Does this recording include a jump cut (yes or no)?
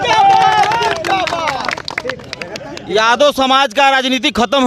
no